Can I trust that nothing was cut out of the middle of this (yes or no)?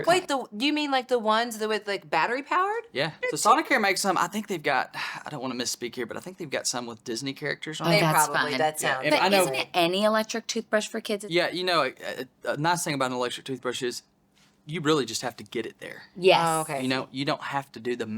no